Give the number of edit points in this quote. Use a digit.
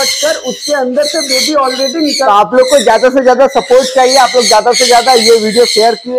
1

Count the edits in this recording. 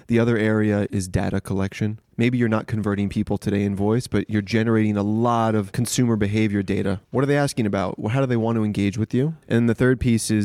5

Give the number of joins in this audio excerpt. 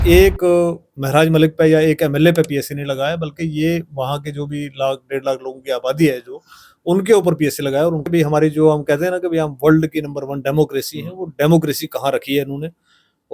1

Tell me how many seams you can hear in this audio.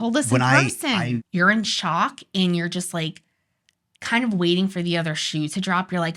1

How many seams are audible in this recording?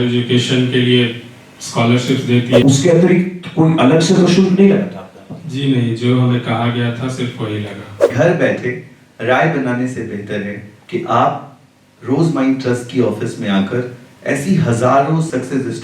2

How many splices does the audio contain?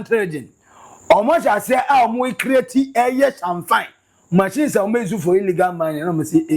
0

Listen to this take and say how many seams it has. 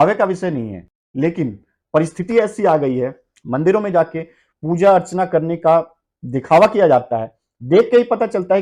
1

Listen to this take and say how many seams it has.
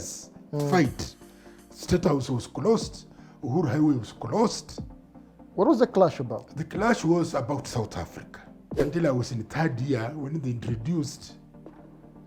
1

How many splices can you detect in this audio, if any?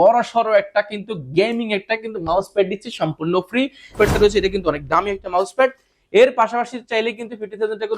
1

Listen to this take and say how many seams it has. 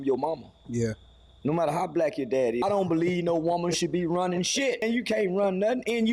2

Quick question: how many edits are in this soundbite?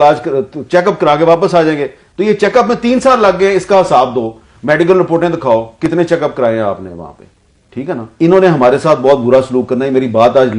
1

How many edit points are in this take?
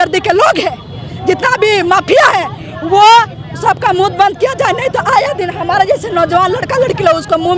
0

